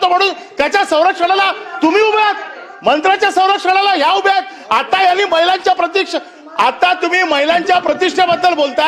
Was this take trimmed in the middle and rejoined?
no; 0 cuts

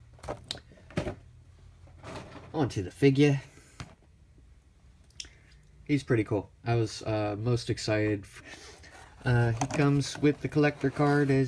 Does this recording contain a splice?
no; 0 cuts

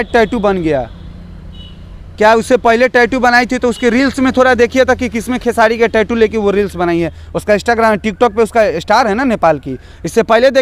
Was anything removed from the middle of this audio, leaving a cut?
no; 0 cuts

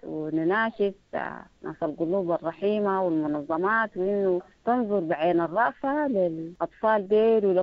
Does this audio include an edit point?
yes; 1 cut; at 6.5 s

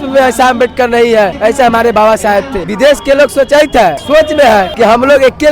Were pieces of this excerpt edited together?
yes; 4 cuts; at 1.3 s, 2.6 s, 4.0 s, 4.7 s

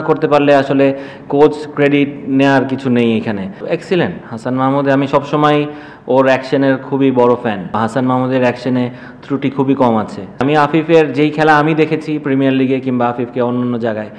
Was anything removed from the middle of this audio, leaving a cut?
yes; 3 cuts; at 3.6 s, 7.7 s, 10.4 s

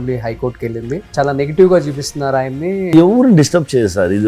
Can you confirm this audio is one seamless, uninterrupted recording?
no; 2 cuts; at 1.1 s, 2.9 s

